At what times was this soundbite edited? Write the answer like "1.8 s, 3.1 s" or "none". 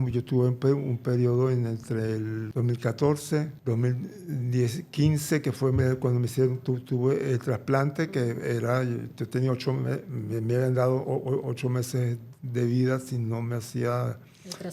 2.4 s, 3.5 s